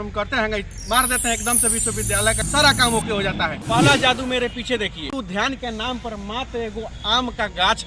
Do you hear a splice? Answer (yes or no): yes